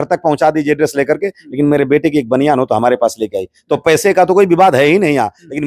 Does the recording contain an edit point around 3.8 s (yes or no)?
no